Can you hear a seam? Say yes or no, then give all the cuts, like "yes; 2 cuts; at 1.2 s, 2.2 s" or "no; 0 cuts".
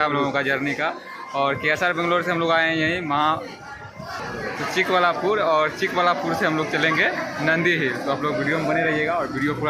no; 0 cuts